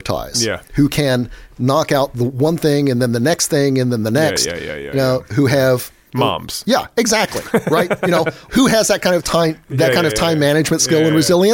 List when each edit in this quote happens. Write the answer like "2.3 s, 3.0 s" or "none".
none